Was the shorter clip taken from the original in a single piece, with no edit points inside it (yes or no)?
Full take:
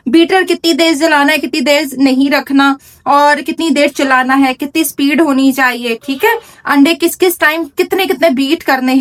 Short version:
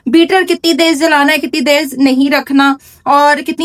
yes